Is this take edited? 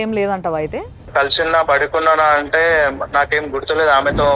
yes; 1 cut; at 1.0 s

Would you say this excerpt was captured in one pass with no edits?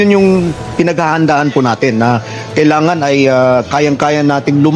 yes; 0 cuts

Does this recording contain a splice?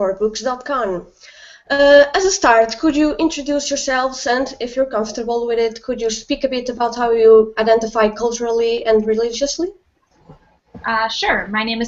no; 0 cuts

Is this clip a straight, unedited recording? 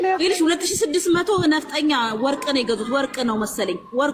yes; 0 cuts

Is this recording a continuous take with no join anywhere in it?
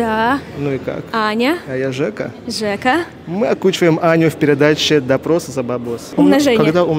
no; 1 cut; at 6.0 s

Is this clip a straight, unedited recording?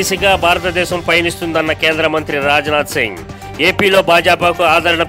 yes; 0 cuts

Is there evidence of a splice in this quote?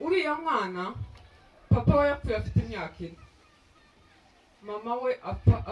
no; 0 cuts

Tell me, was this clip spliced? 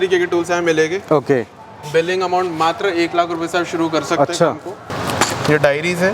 yes; 1 cut; at 4.9 s

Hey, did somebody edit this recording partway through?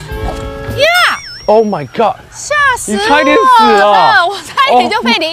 no; 0 cuts

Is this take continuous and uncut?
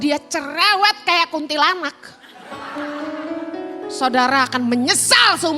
yes; 0 cuts

